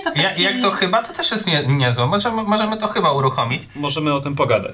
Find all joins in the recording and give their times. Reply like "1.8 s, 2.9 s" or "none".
3.7 s